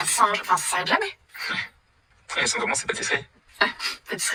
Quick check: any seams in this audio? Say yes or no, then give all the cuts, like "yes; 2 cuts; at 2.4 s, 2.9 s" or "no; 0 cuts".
no; 0 cuts